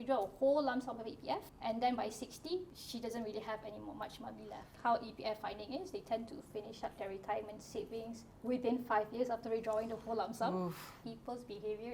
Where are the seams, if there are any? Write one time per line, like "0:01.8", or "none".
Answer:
0:01.5
0:02.8
0:04.7
0:11.0